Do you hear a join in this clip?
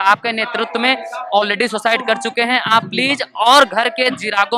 no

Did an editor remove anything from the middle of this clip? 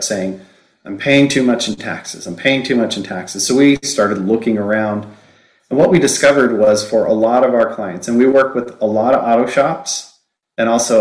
no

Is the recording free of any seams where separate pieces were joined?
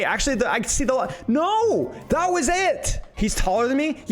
no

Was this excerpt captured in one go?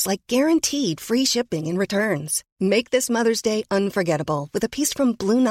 yes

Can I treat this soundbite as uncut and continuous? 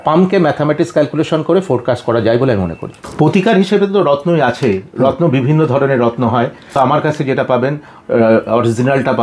no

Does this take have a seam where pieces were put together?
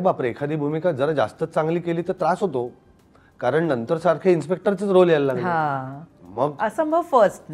no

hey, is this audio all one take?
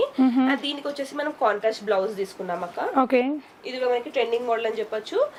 yes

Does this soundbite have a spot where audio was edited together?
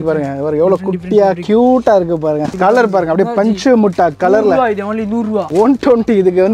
yes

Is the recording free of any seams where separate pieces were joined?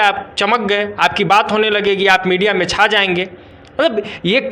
yes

